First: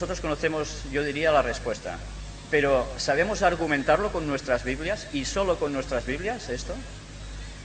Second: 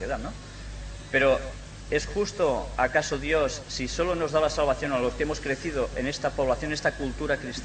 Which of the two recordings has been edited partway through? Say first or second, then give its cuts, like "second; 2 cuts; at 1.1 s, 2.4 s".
first; 1 cut; at 2.7 s